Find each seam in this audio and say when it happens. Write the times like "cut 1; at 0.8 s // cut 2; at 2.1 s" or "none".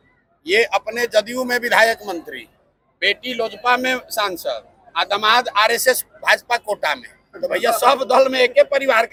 none